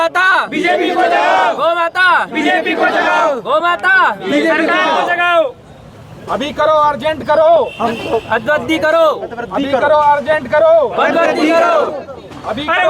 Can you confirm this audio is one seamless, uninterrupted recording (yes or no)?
yes